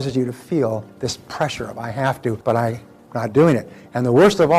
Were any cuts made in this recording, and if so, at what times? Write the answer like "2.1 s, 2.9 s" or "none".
2.4 s